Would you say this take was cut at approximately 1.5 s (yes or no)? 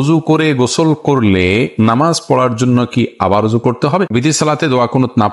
no